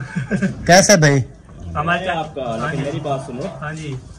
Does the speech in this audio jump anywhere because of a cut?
yes; 1 cut; at 2.1 s

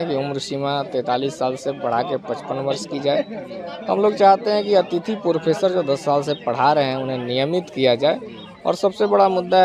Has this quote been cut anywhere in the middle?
no; 0 cuts

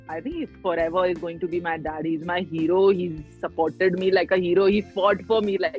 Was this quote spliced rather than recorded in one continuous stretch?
no; 0 cuts

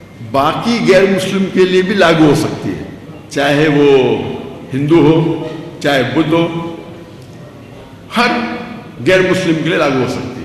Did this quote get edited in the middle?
no; 0 cuts

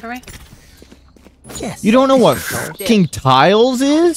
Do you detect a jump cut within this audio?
no; 0 cuts

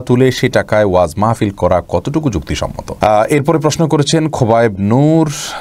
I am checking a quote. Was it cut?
yes; 1 cut; at 2.8 s

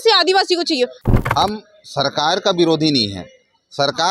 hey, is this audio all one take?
no; 1 cut; at 1.0 s

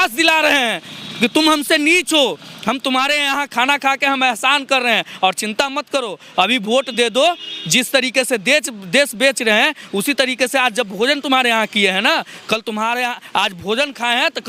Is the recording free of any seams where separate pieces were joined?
yes; 0 cuts

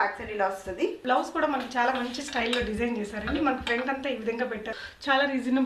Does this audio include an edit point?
yes; 2 cuts; at 1.0 s, 4.7 s

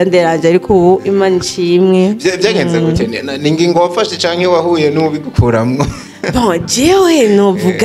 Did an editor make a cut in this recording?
no; 0 cuts

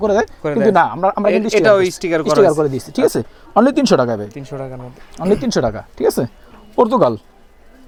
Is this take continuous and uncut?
yes; 0 cuts

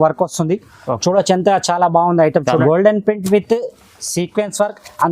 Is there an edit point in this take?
yes; 1 cut; at 2.6 s

